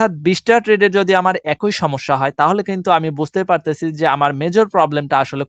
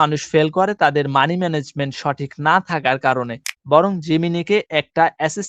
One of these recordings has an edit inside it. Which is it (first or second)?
second